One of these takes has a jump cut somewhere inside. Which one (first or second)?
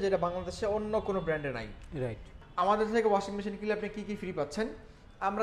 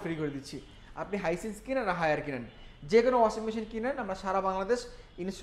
first